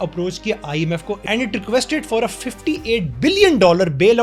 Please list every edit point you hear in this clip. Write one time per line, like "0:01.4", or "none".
0:01.3